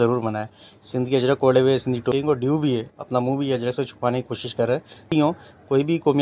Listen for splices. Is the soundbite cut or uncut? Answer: cut